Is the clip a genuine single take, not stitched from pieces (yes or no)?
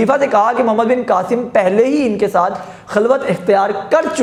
yes